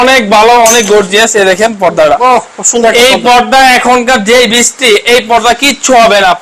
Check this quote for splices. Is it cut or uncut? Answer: uncut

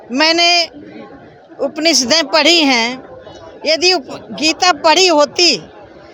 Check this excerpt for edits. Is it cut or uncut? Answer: uncut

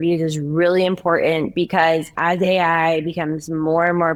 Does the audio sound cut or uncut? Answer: uncut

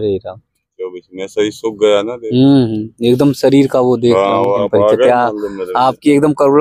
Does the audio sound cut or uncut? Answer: cut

